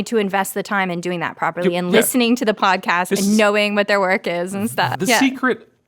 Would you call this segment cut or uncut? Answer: cut